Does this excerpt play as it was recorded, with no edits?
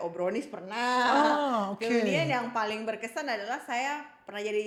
yes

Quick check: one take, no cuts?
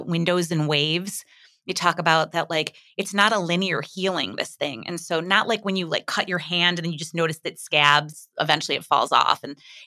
no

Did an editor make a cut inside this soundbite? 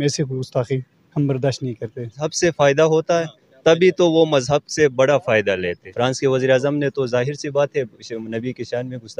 yes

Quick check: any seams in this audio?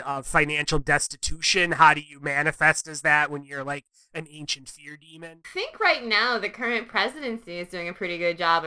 yes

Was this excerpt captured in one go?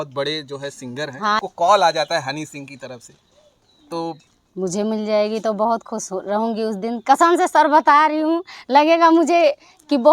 no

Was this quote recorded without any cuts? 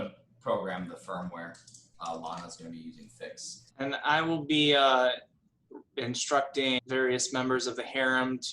no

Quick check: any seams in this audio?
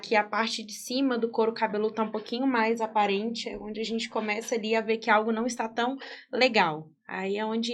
no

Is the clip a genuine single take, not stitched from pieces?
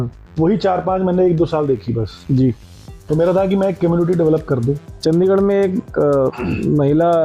yes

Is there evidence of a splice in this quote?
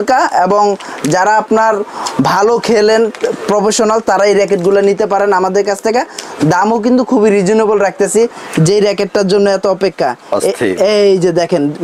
yes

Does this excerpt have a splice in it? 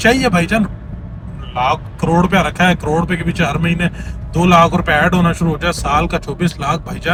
no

